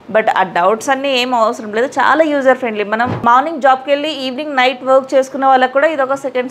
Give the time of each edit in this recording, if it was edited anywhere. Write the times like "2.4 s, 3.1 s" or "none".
3.1 s